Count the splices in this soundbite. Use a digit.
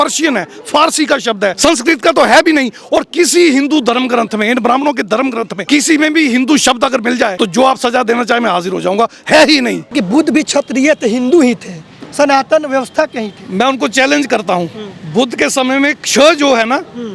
4